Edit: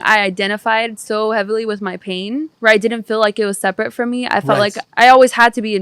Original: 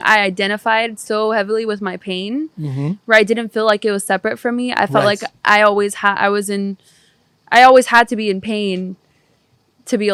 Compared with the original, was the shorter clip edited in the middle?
yes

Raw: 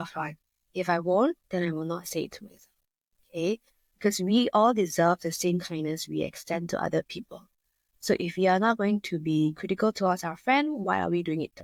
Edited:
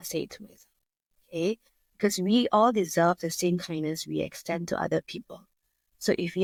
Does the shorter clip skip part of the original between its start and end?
no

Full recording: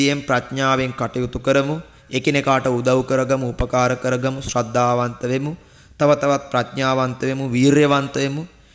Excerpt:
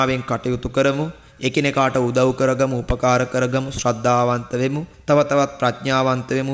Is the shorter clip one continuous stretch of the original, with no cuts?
no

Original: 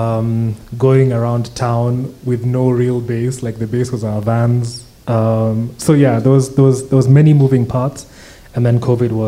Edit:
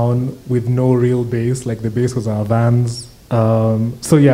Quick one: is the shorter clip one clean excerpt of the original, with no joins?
yes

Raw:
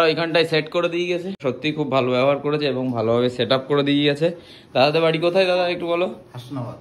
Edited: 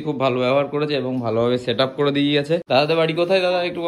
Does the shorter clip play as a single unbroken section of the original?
no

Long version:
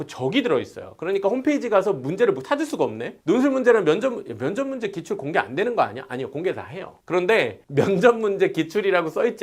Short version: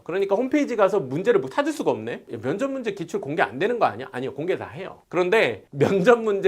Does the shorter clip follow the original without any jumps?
no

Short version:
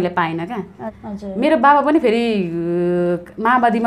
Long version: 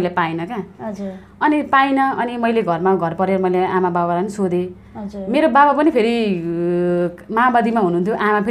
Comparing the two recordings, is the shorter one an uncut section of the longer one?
no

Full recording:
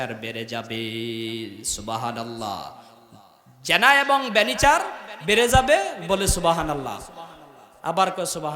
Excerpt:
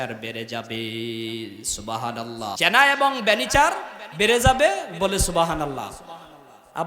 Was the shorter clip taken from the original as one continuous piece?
no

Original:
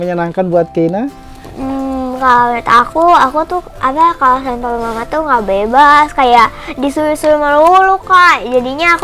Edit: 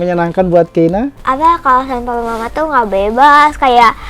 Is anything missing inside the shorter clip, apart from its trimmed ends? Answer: yes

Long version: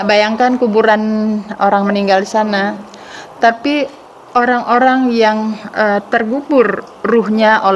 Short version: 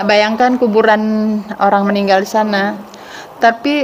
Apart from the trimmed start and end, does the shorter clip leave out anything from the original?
no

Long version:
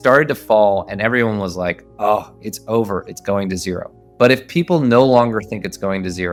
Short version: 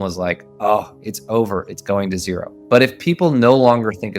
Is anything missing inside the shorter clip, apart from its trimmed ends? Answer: yes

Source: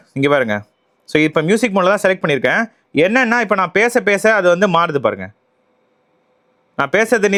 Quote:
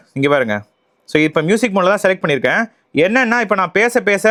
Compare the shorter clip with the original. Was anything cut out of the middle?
no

